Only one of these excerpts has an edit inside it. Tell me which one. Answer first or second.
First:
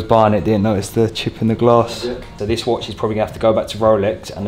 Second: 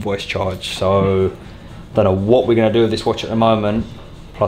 first